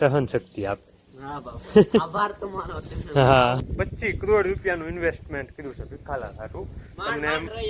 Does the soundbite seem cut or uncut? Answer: cut